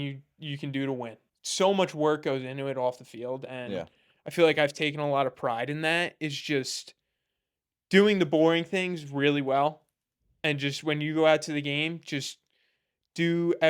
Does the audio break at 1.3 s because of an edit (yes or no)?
yes